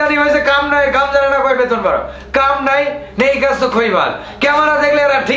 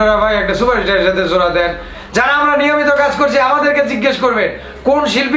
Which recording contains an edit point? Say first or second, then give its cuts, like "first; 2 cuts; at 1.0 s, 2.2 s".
second; 1 cut; at 1.9 s